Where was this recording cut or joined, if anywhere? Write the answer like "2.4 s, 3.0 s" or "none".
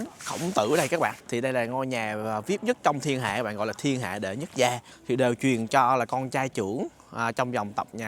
1.2 s, 4.9 s